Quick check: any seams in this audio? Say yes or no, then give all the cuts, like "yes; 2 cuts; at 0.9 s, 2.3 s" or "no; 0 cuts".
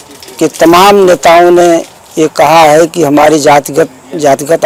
no; 0 cuts